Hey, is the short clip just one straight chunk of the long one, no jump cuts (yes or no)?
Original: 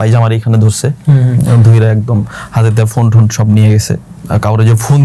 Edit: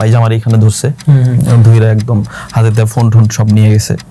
yes